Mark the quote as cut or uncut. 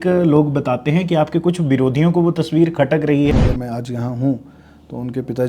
cut